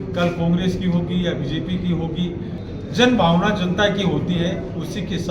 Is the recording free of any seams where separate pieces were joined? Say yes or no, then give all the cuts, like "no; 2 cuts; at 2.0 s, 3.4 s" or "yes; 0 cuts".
no; 1 cut; at 2.6 s